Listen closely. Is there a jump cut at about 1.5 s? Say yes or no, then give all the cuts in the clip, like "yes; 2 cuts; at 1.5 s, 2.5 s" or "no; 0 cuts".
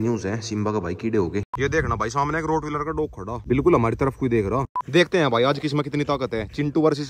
yes; 3 cuts; at 1.5 s, 3.5 s, 4.9 s